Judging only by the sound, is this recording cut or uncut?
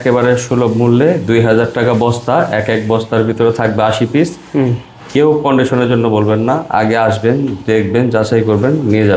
uncut